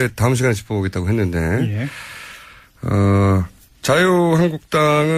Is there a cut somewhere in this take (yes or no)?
no